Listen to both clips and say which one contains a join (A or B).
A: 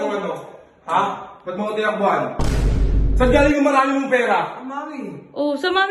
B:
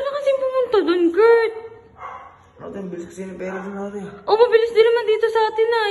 A